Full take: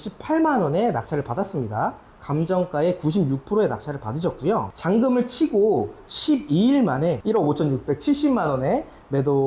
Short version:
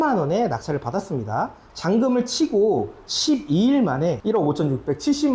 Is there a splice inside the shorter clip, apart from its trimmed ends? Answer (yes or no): yes